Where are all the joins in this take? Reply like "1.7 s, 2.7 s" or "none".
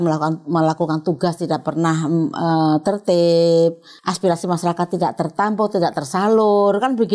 3.9 s